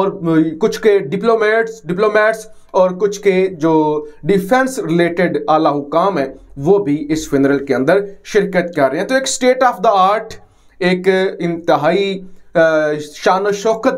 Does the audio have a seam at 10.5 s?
no; 0 cuts

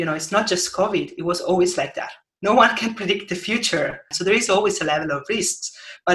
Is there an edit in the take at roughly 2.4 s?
no; 1 cut; at 4.1 s

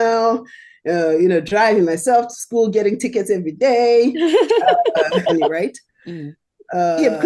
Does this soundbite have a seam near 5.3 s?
yes; 1 cut; at 5.3 s

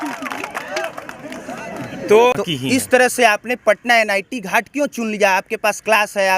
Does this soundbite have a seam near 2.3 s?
yes; 1 cut; at 2.3 s

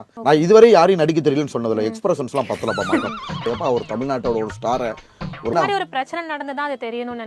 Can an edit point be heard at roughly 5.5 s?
yes; 1 cut; at 5.5 s

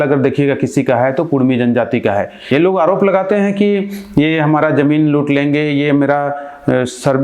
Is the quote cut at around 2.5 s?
yes; 1 cut; at 2.5 s

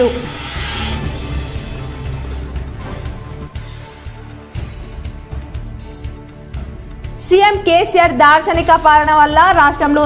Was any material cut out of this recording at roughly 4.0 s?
no; 0 cuts

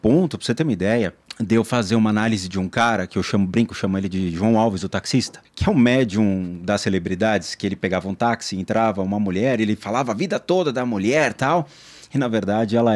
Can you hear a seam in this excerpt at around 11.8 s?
no; 2 cuts; at 1.3 s, 5.4 s

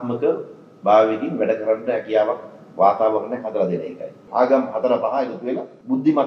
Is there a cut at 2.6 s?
no; 1 cut; at 4.2 s

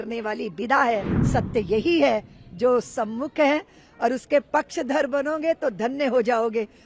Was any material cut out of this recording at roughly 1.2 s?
yes; 1 cut; at 1.2 s

